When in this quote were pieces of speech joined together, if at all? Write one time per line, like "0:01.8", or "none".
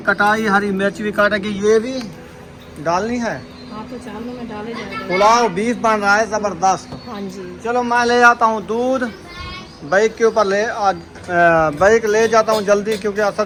none